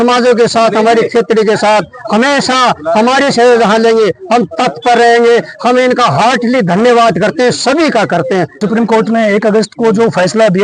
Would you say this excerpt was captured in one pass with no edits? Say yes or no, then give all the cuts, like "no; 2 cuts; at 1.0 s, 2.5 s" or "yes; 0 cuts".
no; 1 cut; at 8.6 s